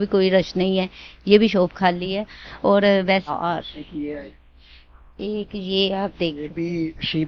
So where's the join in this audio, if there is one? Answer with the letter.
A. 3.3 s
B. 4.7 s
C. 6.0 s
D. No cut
A